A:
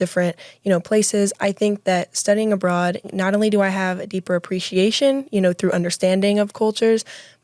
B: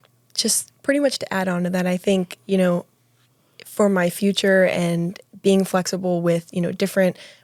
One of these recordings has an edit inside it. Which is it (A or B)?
A